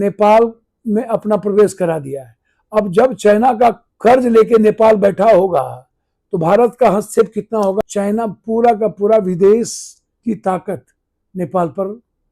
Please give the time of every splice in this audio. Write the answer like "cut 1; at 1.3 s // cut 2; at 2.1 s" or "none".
cut 1; at 3.9 s // cut 2; at 7.8 s